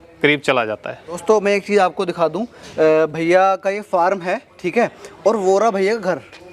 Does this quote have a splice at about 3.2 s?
no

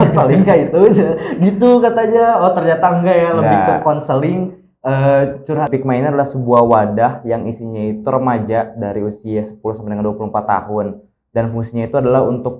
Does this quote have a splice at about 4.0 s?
no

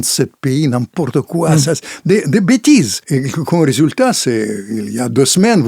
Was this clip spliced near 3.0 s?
yes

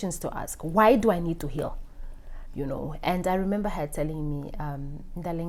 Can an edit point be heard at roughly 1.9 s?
no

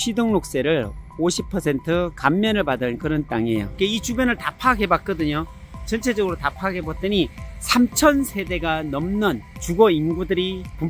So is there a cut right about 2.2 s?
no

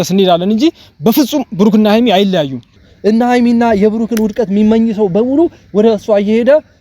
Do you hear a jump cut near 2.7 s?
yes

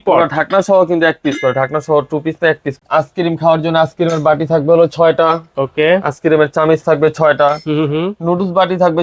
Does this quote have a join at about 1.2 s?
no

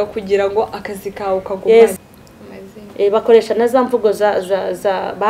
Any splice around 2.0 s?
yes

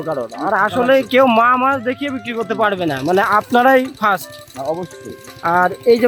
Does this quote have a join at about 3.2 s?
no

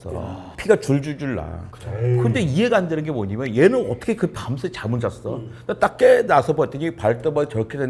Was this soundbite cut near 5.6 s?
no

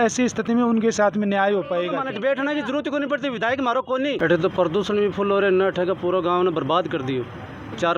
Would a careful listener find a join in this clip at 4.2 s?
yes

